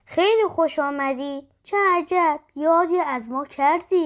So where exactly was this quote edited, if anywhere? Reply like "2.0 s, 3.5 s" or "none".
none